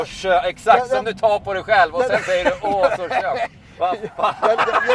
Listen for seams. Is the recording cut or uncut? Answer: uncut